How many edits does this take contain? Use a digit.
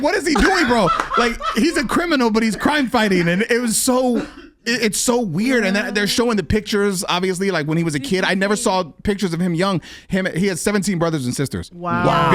0